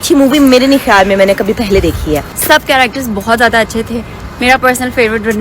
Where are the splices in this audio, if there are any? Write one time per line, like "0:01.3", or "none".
0:02.3